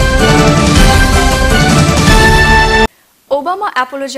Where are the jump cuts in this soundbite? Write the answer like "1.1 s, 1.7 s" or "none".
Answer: none